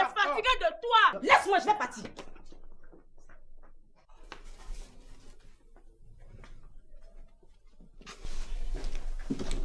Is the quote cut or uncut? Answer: cut